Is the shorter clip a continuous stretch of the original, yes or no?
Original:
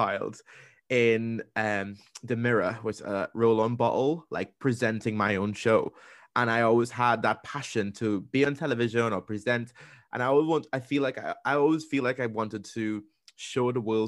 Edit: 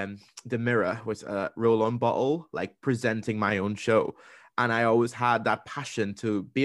yes